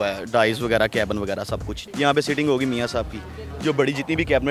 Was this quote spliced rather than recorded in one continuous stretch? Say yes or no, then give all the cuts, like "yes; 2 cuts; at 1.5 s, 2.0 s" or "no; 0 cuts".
yes; 1 cut; at 1.7 s